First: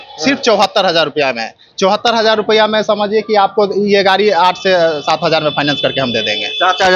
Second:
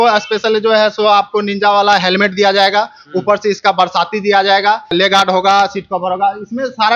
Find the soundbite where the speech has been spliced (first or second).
second